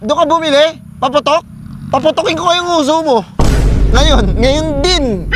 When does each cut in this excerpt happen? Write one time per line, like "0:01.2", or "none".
none

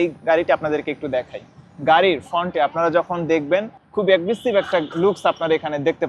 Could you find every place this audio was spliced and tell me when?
none

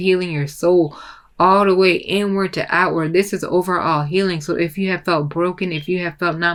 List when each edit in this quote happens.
none

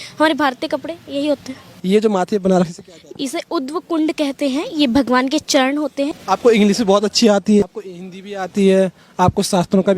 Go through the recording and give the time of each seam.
0:01.7
0:06.2
0:07.6

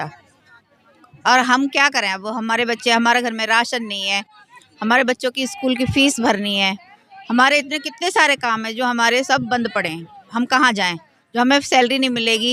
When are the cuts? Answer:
none

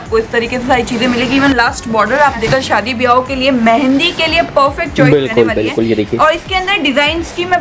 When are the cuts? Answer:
0:02.5

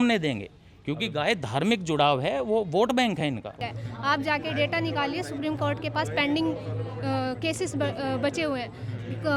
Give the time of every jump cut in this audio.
0:03.6

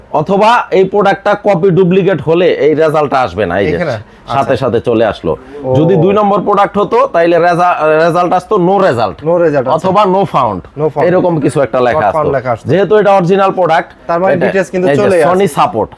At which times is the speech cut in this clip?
none

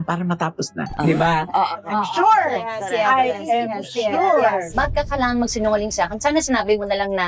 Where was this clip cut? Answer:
0:01.9
0:04.7

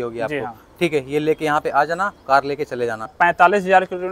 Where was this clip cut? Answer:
0:03.0

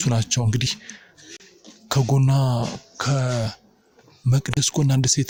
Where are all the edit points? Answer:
none

